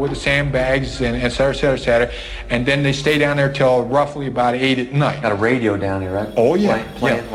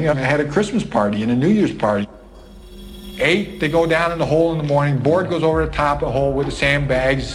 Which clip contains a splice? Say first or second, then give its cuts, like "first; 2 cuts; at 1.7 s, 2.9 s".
first; 1 cut; at 5.2 s